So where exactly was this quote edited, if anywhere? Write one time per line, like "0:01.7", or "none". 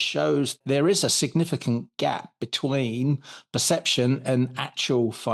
none